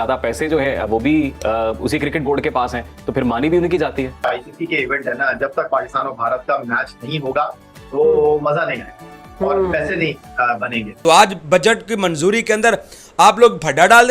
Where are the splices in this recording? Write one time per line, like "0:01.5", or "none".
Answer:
0:04.2
0:10.8